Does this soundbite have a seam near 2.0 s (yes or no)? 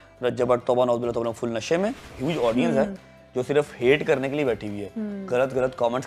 yes